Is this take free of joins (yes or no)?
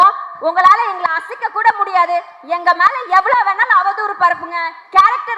yes